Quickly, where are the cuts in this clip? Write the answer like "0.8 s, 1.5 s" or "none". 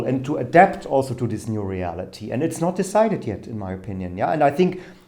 none